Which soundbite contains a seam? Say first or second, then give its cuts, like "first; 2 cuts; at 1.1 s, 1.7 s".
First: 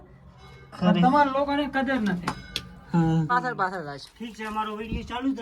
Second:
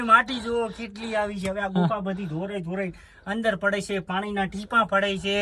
first; 1 cut; at 3.3 s